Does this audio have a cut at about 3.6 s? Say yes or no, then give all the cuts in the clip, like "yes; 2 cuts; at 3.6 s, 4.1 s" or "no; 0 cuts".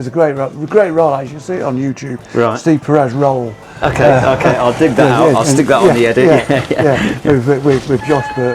no; 0 cuts